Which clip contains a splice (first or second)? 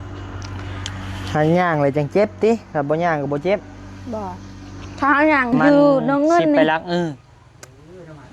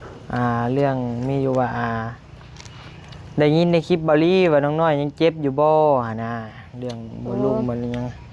first